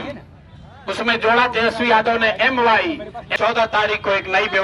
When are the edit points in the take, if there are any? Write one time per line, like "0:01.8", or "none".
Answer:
0:03.2